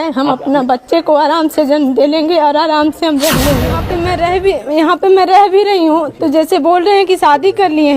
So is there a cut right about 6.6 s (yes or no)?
no